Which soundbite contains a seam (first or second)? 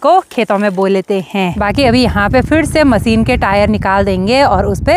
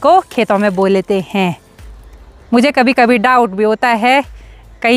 first